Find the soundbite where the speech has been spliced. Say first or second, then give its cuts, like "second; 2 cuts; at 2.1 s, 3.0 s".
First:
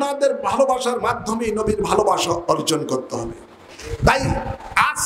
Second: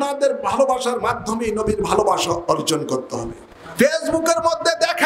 second; 1 cut; at 3.6 s